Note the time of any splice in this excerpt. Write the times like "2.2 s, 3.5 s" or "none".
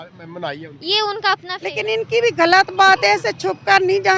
1.6 s